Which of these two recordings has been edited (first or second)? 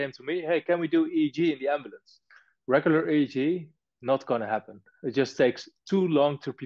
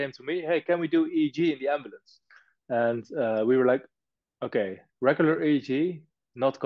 first